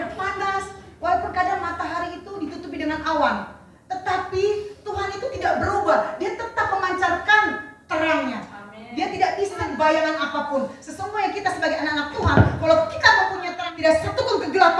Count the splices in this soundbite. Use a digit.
2